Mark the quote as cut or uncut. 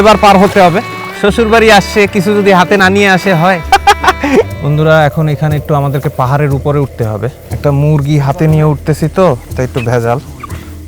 cut